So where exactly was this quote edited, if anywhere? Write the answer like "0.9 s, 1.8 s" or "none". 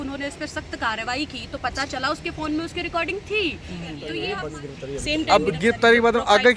4.1 s